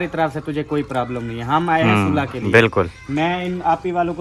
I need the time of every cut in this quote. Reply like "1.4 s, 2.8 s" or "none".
none

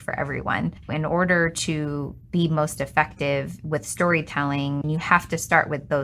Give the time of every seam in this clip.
0.8 s, 4.8 s

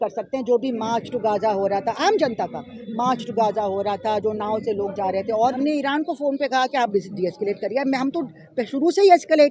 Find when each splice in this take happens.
5.5 s

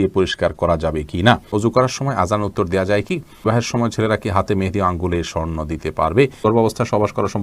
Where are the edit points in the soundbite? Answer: 1.5 s, 3.4 s, 6.4 s

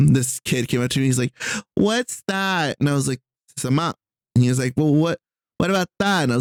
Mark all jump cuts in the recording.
none

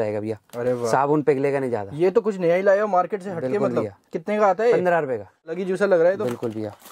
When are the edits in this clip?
5.5 s

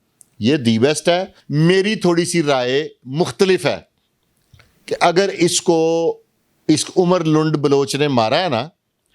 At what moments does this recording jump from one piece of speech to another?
1.4 s

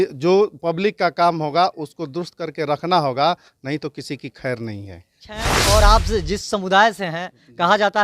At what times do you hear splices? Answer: 5.5 s

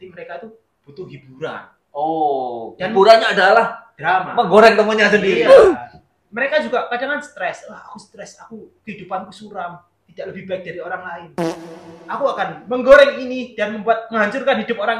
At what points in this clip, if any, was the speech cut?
none

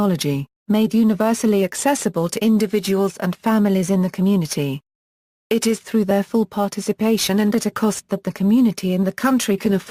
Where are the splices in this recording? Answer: 5.6 s

